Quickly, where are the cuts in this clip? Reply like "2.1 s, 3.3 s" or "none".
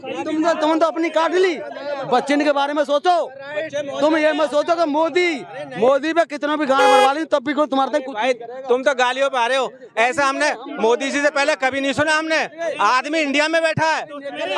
none